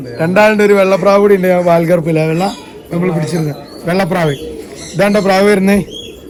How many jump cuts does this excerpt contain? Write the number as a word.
zero